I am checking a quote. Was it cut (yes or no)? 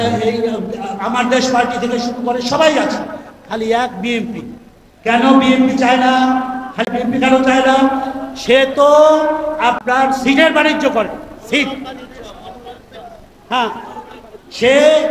yes